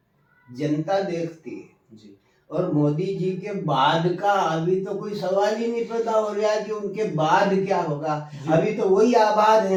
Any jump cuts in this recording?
no; 0 cuts

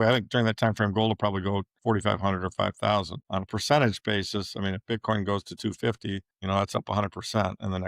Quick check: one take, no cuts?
no; 2 cuts; at 1.7 s, 6.3 s

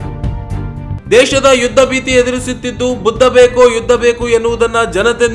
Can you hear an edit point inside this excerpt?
yes; 1 cut; at 1.0 s

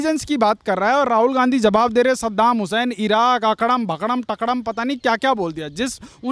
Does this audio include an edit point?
no; 0 cuts

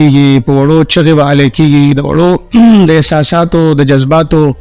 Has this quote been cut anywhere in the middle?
no; 0 cuts

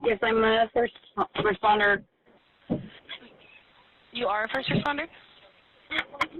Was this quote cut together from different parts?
no; 0 cuts

